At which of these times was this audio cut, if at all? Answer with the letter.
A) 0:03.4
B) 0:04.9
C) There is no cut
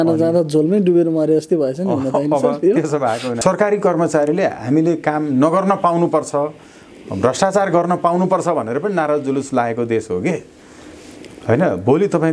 A